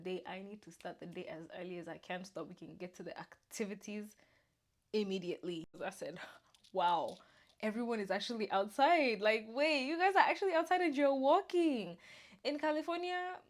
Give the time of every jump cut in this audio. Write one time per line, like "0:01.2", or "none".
0:05.7